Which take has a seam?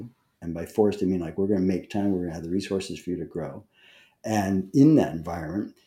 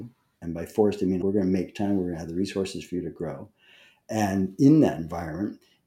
second; 1 cut; at 1.2 s

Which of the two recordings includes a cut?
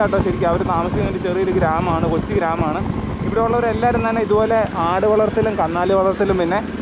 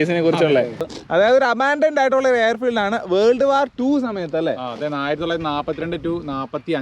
second; 1 cut; at 0.9 s

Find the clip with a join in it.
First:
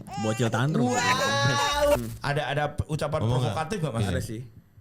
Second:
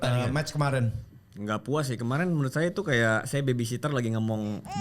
first; 1 cut; at 2.0 s

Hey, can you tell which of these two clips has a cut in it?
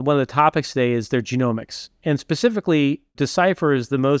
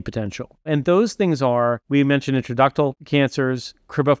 second; 2 cuts; at 1.8 s, 3.0 s

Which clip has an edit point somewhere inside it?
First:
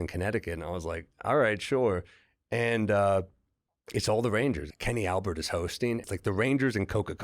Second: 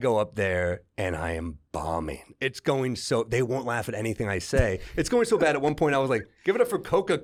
first; 2 cuts; at 4.7 s, 6.0 s

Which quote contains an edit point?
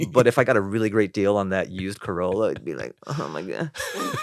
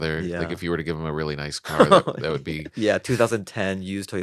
second; 1 cut; at 2.7 s

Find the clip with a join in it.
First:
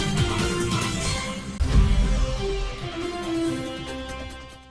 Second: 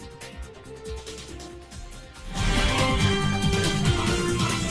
first; 1 cut; at 1.5 s

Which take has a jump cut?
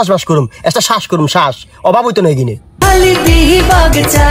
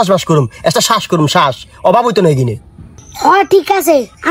first; 1 cut; at 2.8 s

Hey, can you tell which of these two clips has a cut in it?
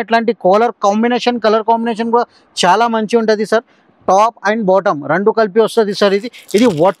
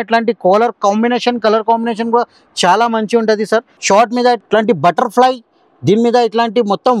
second; 2 cuts; at 3.7 s, 4.4 s

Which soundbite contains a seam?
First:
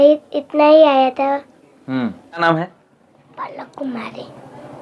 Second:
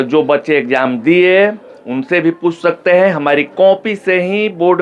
first; 1 cut; at 2.4 s

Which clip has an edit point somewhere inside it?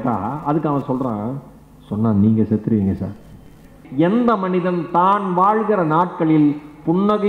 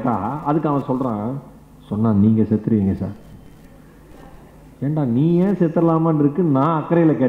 first; 1 cut; at 3.8 s

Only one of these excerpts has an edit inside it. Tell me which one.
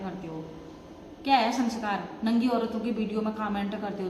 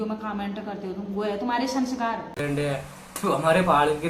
second; 1 cut; at 2.4 s

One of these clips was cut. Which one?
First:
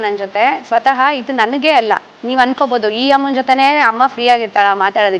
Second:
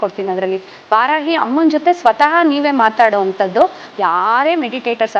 second; 1 cut; at 3.8 s

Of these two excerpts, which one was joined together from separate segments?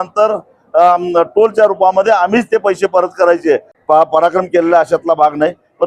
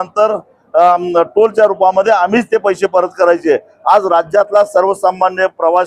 first; 1 cut; at 3.7 s

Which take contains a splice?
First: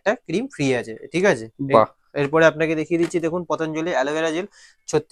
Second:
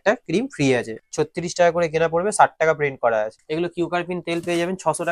second; 2 cuts; at 1.0 s, 3.4 s

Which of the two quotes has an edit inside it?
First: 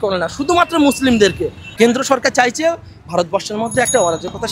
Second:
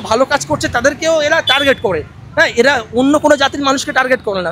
first; 1 cut; at 1.6 s

